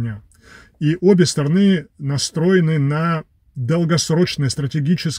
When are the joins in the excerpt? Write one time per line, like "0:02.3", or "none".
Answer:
none